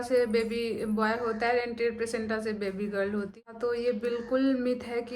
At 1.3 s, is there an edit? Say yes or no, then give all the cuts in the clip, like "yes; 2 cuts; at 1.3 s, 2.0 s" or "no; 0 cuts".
no; 1 cut; at 3.4 s